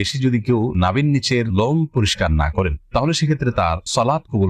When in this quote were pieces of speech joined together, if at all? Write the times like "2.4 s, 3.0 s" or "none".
none